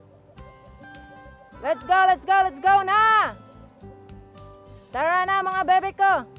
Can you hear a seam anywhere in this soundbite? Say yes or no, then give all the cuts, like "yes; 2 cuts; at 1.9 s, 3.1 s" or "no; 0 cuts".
no; 0 cuts